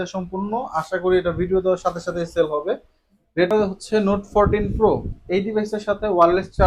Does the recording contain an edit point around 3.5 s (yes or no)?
yes